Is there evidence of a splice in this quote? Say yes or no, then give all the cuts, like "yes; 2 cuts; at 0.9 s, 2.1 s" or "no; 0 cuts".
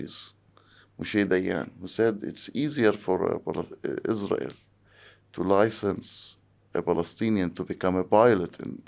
no; 0 cuts